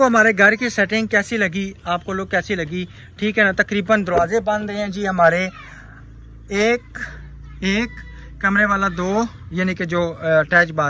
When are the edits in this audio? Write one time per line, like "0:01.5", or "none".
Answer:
none